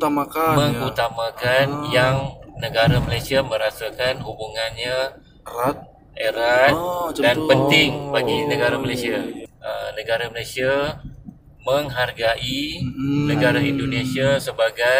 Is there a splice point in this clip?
yes; 1 cut; at 9.5 s

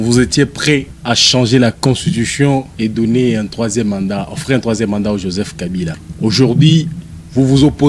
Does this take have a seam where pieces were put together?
yes; 3 cuts; at 0.9 s, 2.7 s, 6.0 s

